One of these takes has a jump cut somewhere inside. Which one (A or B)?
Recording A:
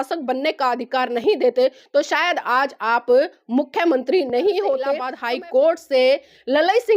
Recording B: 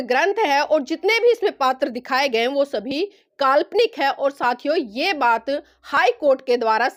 A